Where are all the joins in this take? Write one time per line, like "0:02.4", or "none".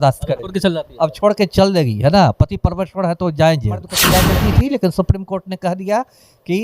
0:04.1